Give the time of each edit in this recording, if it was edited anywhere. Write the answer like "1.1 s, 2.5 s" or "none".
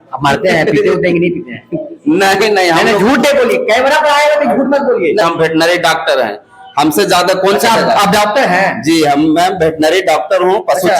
5.2 s